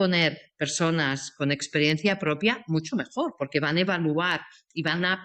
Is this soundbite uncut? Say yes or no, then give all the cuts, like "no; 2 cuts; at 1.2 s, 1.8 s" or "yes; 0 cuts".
yes; 0 cuts